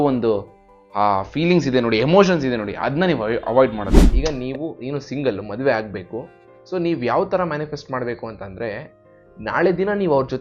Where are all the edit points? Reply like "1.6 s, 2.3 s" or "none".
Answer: 4.0 s